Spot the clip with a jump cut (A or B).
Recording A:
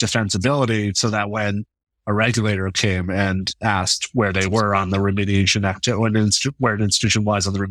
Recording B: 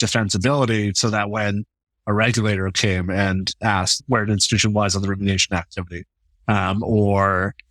B